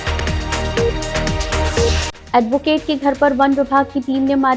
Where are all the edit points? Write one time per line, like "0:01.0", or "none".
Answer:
0:02.1